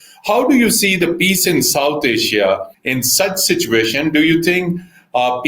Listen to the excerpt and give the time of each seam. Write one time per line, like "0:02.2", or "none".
0:02.8

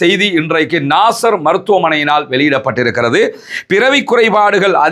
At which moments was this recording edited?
none

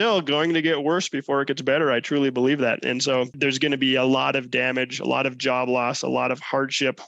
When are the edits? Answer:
0:03.3

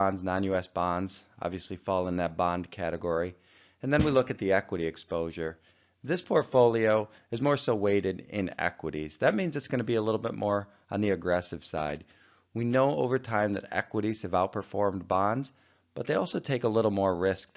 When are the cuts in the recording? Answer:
0:16.4

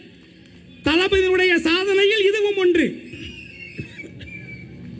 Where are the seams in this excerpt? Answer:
none

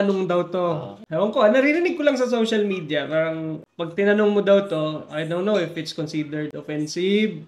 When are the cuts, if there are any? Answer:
0:01.0
0:03.6

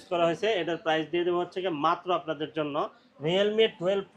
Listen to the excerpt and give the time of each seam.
0:03.0

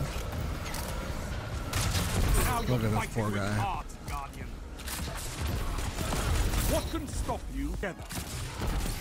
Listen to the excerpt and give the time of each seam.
0:01.3
0:07.8

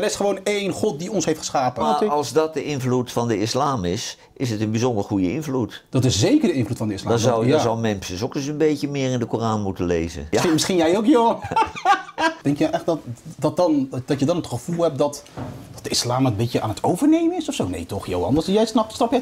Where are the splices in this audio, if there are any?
0:01.8
0:10.2
0:12.4

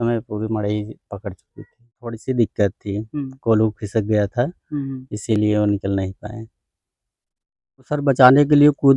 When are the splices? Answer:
0:02.2
0:07.9

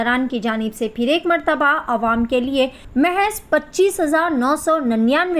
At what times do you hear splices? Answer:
0:02.8

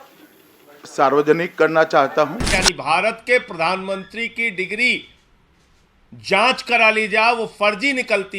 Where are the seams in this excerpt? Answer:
0:02.5

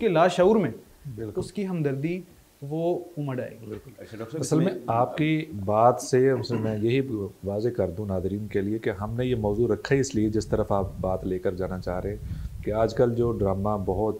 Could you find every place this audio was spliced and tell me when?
none

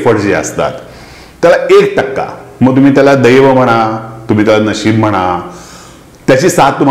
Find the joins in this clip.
none

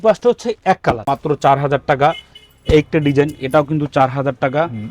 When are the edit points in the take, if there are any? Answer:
0:01.0

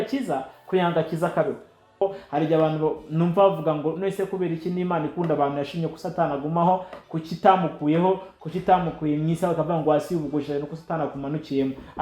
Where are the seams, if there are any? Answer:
0:02.0

